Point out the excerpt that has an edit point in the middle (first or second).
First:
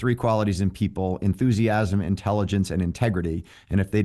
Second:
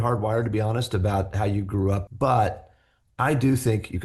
second